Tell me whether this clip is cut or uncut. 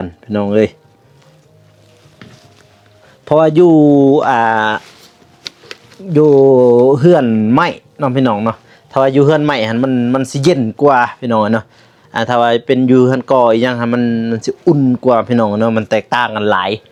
uncut